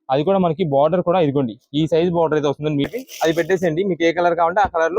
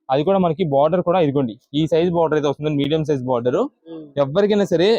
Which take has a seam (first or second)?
first